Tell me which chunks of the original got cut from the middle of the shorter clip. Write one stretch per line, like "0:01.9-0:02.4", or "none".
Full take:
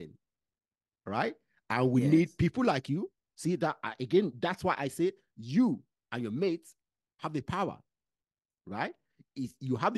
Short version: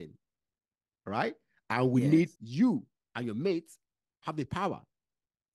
0:02.3-0:05.3